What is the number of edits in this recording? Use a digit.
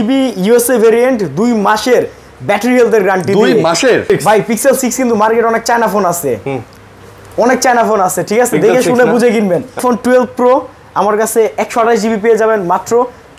2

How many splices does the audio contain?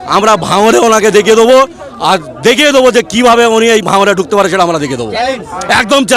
0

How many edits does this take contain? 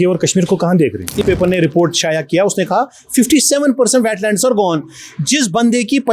1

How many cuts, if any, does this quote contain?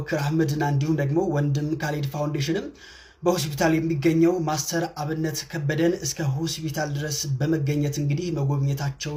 0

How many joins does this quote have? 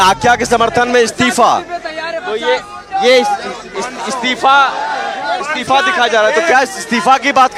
0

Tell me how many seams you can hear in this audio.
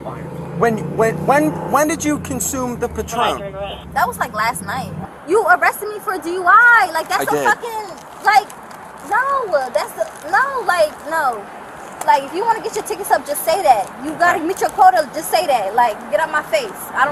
1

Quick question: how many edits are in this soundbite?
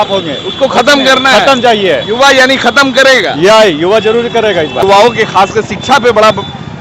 1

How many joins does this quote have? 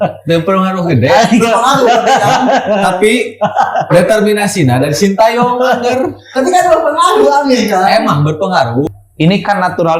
1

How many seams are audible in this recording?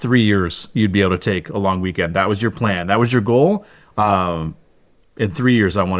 0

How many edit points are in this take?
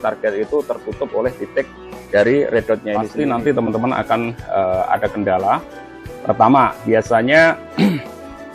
1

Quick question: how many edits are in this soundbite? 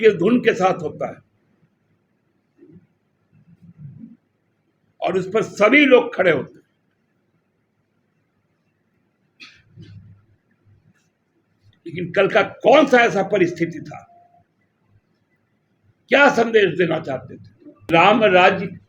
1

